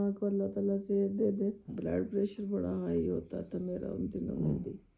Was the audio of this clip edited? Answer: yes; 1 cut; at 1.7 s

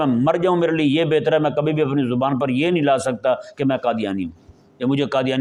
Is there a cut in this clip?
no; 0 cuts

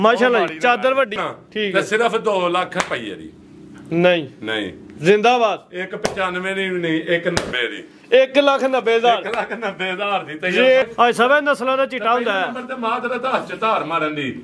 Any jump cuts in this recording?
yes; 2 cuts; at 1.2 s, 10.9 s

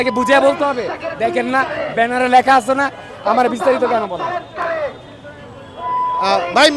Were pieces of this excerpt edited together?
no; 0 cuts

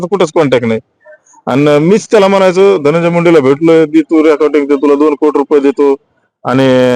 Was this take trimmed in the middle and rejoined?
no; 0 cuts

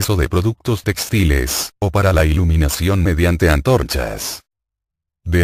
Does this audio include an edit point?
no; 0 cuts

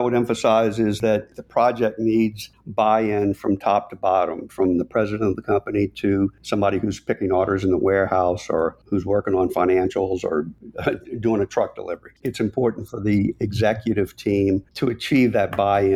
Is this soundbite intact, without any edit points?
no; 5 cuts; at 1.0 s, 6.4 s, 8.8 s, 12.3 s, 14.7 s

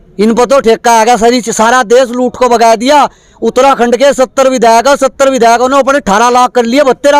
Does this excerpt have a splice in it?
no; 0 cuts

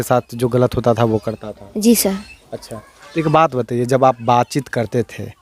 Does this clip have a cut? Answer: no; 0 cuts

